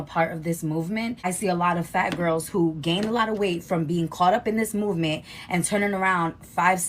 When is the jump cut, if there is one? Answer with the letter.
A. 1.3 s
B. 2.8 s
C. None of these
A